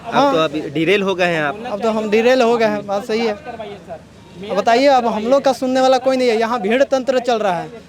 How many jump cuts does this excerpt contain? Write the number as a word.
zero